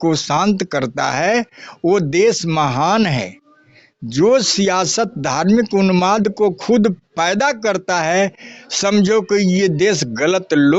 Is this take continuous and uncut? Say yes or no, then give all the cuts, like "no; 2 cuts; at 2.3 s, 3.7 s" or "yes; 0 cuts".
yes; 0 cuts